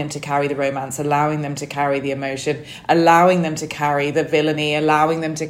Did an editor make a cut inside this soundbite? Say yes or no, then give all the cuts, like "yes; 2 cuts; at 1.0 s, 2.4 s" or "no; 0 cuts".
no; 0 cuts